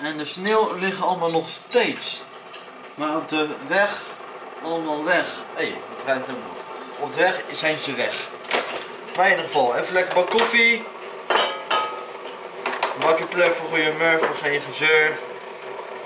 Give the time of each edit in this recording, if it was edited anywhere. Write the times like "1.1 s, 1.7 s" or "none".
none